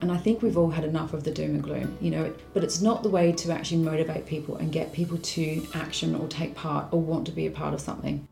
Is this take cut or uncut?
cut